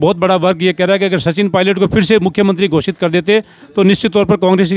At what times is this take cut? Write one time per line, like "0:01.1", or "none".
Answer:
none